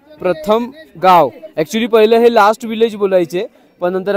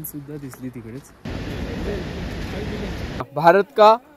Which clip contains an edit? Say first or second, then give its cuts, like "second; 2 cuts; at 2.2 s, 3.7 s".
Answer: second; 2 cuts; at 1.2 s, 3.2 s